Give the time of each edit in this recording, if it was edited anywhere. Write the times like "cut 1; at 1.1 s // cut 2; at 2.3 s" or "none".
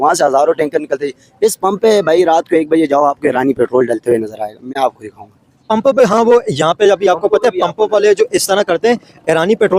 none